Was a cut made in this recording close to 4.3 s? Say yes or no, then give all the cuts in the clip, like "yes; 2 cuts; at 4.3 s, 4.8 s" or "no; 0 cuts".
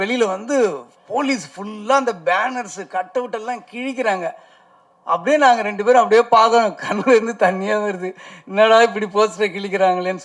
no; 0 cuts